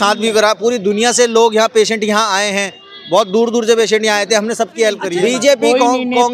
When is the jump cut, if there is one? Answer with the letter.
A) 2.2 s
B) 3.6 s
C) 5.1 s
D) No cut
C